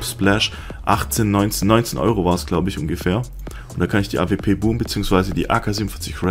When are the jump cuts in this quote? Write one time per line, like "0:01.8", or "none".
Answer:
0:04.8